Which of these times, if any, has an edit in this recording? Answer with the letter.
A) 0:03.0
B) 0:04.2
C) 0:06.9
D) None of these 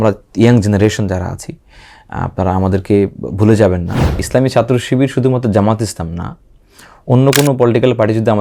B